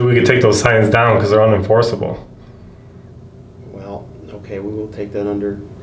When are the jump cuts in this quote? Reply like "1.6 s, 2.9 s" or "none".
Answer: none